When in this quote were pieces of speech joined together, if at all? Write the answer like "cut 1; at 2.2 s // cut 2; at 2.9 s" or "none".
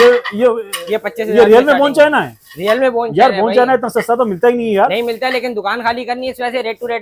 none